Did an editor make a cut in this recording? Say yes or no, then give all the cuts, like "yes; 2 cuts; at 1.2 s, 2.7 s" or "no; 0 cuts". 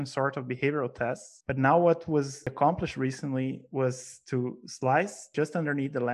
yes; 3 cuts; at 1.3 s, 2.5 s, 5.2 s